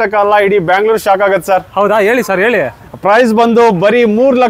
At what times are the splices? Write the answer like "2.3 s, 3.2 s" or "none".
none